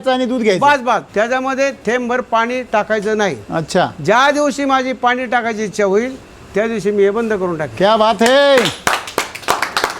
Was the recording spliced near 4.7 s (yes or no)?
no